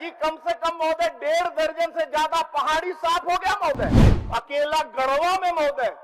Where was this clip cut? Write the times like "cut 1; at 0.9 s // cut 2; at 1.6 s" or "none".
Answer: cut 1; at 4.2 s